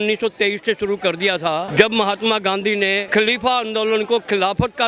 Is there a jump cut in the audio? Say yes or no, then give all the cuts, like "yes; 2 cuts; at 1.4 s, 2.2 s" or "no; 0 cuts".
yes; 2 cuts; at 1.7 s, 3.0 s